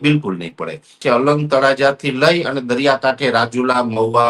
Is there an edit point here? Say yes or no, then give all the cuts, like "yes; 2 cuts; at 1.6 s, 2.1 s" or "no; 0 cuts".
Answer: yes; 1 cut; at 1.0 s